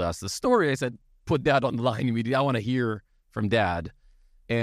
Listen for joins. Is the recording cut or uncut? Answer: uncut